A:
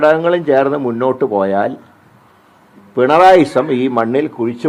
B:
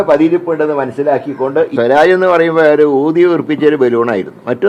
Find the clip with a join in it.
B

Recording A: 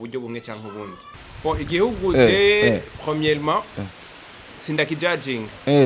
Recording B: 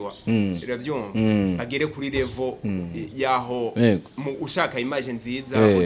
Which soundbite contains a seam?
A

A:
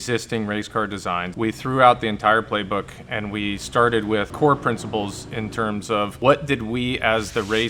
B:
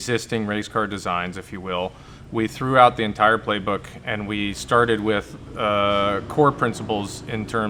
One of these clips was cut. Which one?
A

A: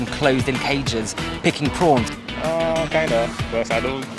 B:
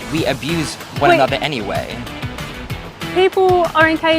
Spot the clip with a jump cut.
A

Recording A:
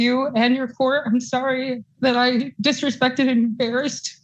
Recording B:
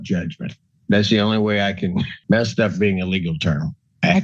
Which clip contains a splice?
B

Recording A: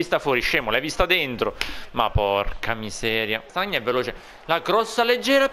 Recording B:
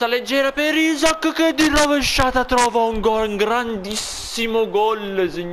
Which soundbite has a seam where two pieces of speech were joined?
A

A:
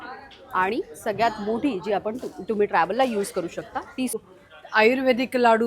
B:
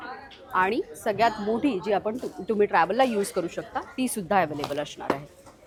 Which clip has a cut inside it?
A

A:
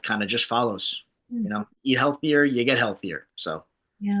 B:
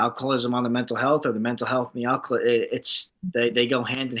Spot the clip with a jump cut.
A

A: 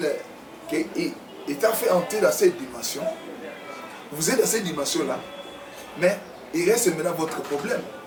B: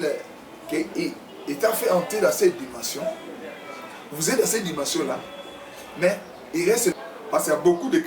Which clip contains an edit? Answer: B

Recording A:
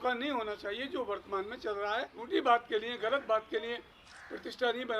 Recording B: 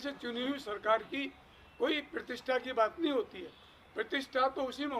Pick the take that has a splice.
A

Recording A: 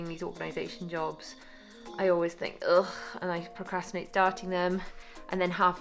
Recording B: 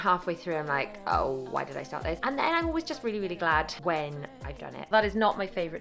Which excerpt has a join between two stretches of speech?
B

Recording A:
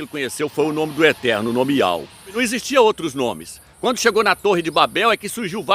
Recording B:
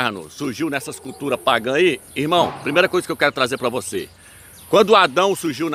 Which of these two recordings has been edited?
A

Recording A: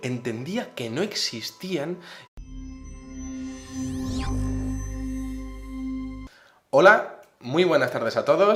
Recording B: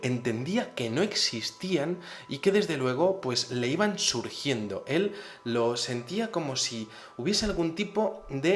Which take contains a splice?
B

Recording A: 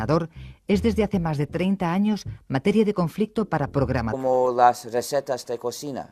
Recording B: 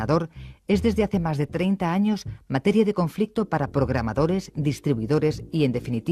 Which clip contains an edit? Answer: B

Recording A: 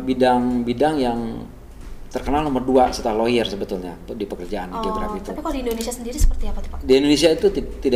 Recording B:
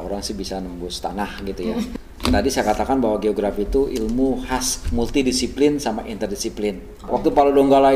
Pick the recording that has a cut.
B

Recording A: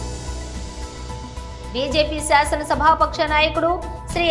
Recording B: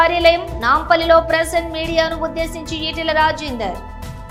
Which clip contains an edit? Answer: A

